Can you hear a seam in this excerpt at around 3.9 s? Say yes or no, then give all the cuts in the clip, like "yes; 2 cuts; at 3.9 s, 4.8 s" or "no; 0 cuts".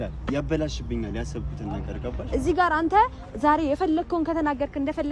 no; 1 cut; at 2.2 s